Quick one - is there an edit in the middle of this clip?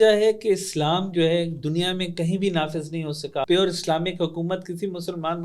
yes; 1 cut; at 3.4 s

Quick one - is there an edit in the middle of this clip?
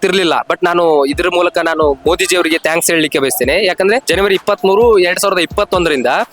yes; 1 cut; at 4.0 s

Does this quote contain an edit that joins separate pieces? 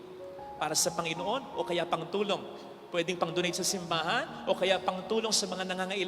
no; 0 cuts

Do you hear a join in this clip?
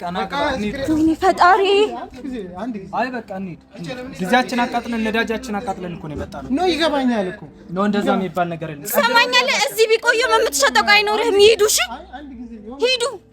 no; 0 cuts

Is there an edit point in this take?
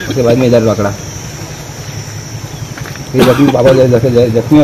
no; 0 cuts

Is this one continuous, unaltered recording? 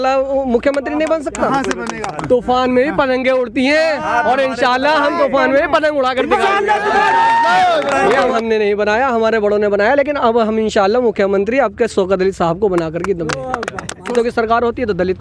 no; 3 cuts; at 2.1 s, 8.3 s, 14.1 s

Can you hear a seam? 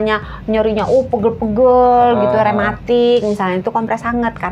no; 0 cuts

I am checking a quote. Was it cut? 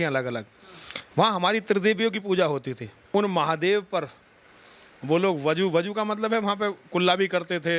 yes; 1 cut; at 2.9 s

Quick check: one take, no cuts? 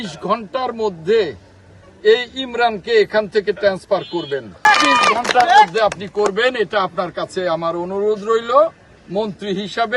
yes; 0 cuts

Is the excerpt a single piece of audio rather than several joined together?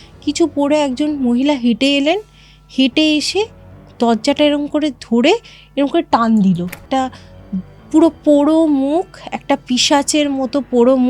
no; 1 cut; at 6.8 s

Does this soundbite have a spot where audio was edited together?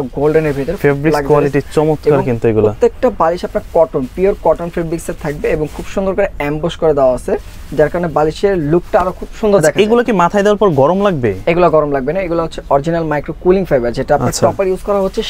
no; 0 cuts

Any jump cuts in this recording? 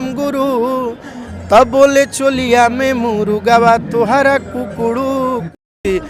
no; 0 cuts

